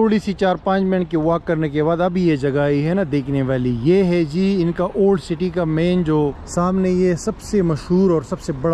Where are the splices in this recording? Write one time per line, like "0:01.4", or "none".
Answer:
0:06.4

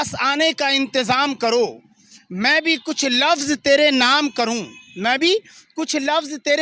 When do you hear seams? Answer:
none

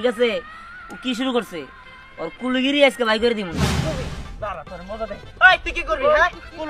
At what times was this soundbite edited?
0:03.8

